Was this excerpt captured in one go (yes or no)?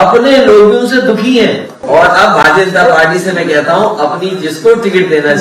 no